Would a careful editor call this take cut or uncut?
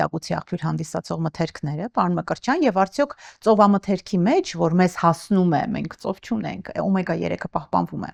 uncut